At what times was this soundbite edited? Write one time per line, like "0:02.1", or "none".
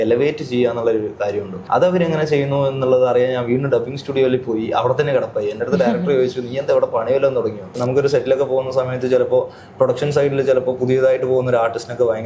0:01.5
0:07.8

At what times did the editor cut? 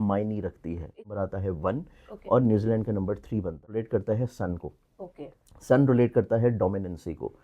0:01.1
0:03.8

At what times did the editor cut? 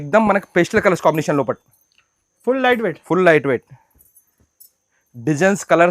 none

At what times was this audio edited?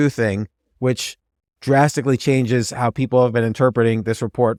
none

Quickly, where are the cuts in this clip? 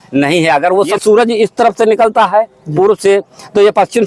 0:00.9

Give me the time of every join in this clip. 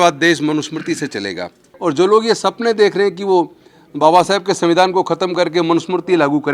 0:01.7

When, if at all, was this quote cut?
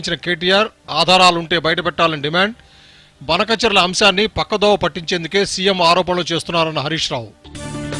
none

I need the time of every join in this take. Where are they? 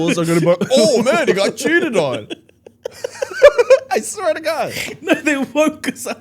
none

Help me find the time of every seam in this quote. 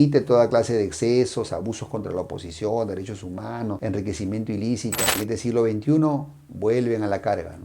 0:05.1

